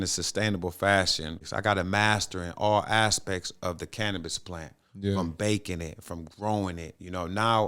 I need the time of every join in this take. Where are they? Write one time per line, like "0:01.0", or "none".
0:01.4

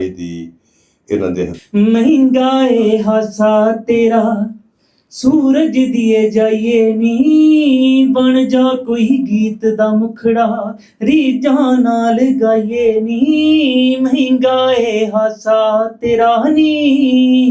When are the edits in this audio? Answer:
0:01.6

